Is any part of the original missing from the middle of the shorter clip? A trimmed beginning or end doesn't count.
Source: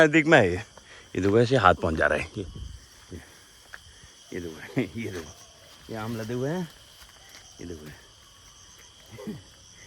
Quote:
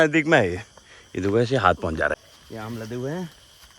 yes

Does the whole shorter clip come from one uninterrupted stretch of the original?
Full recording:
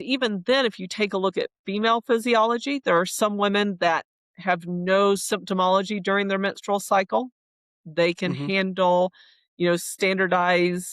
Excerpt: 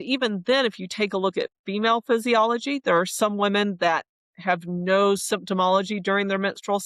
yes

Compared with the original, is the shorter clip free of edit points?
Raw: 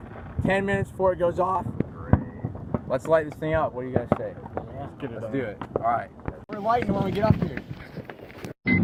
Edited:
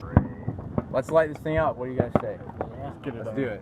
yes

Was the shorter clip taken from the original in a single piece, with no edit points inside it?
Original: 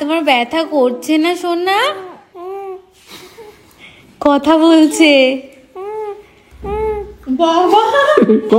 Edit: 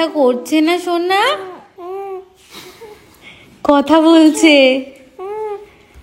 yes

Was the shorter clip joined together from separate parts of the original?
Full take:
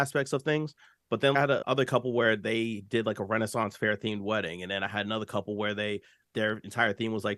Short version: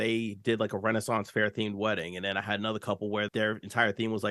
yes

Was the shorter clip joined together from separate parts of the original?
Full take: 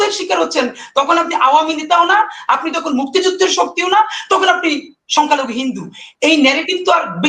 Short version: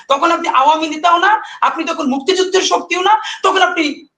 no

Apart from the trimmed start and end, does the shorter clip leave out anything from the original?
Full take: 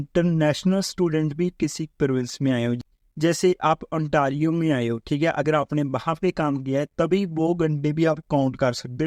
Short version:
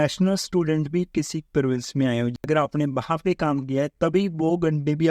yes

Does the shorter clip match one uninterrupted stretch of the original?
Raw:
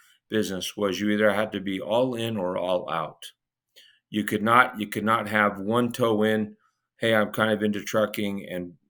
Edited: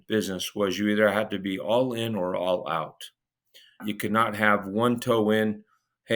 no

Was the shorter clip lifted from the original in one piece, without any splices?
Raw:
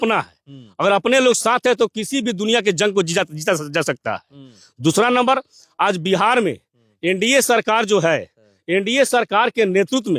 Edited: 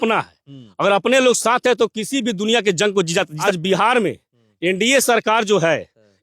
no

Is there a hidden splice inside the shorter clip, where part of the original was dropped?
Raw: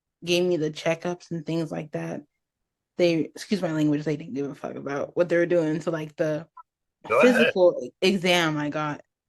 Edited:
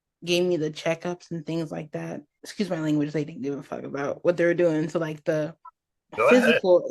yes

